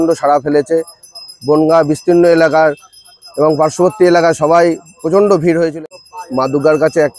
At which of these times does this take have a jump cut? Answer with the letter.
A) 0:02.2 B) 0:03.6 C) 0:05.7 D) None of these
C